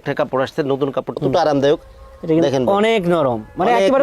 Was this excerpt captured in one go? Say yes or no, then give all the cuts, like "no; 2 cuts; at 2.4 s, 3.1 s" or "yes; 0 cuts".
no; 1 cut; at 1.2 s